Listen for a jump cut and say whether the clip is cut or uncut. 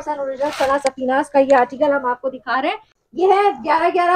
cut